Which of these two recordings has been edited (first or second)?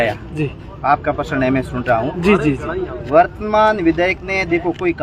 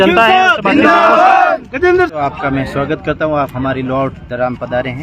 second